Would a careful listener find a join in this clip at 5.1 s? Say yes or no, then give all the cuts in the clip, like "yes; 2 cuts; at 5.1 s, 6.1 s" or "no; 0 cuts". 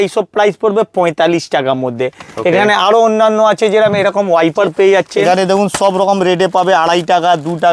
yes; 1 cut; at 5.1 s